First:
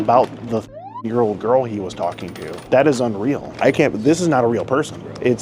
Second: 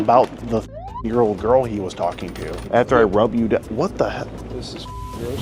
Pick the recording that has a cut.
second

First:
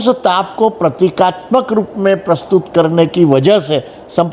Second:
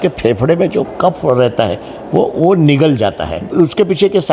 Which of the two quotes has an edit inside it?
second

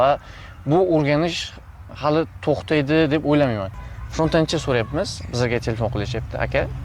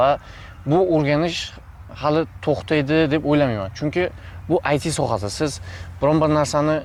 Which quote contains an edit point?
first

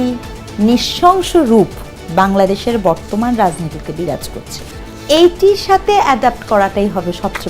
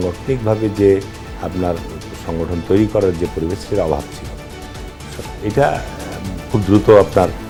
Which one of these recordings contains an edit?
first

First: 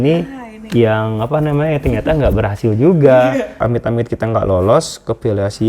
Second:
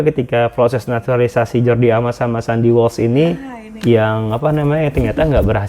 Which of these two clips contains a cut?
first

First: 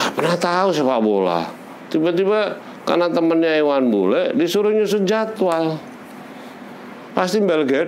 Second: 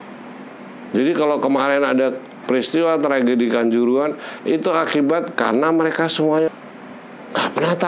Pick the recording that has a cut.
second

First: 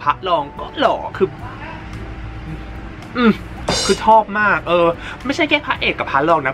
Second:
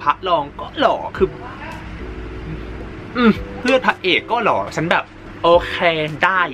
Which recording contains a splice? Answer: second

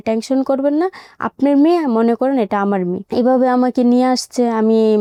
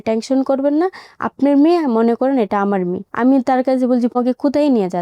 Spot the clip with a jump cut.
second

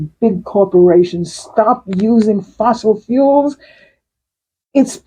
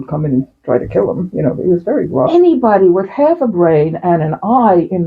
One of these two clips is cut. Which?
second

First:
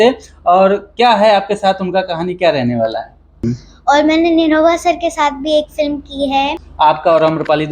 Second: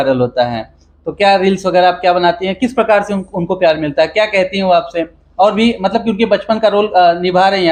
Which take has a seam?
first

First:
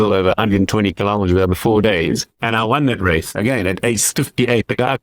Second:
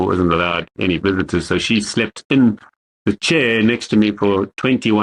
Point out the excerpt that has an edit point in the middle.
first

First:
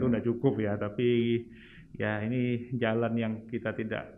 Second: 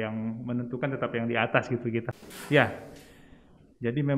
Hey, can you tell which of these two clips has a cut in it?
second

